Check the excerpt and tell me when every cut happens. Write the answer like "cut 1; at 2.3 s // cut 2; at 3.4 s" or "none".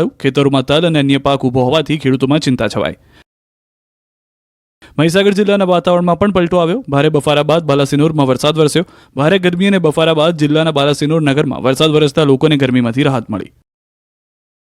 cut 1; at 5.6 s